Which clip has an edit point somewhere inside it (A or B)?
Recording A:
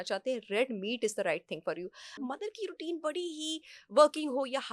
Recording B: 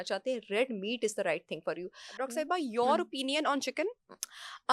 A